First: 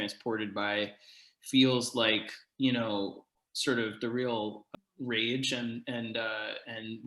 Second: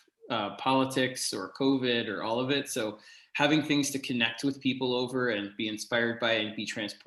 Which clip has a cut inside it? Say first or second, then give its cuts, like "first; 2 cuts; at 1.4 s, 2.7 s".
first; 2 cuts; at 3.3 s, 4.6 s